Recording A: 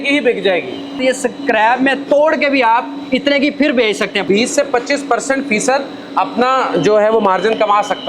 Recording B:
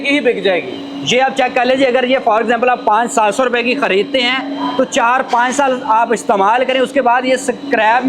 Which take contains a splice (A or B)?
A